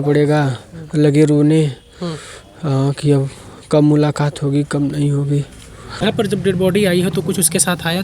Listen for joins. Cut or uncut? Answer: cut